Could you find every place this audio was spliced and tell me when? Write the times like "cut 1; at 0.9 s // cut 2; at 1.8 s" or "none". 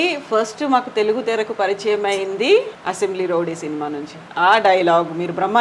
cut 1; at 2.7 s